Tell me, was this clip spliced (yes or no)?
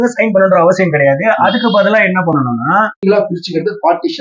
yes